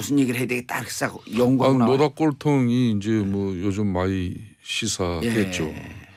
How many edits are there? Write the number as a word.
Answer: zero